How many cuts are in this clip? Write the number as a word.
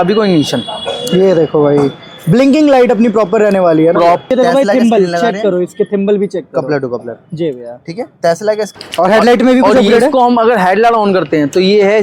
two